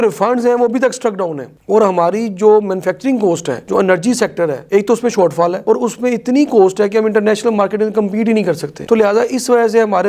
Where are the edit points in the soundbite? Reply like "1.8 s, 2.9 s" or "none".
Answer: none